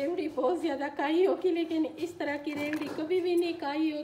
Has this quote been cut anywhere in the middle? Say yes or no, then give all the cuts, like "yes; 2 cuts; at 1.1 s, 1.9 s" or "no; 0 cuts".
no; 0 cuts